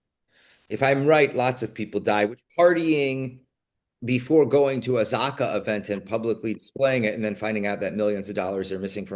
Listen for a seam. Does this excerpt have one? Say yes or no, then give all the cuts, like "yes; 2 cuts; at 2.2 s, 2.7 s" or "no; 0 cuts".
yes; 1 cut; at 2.4 s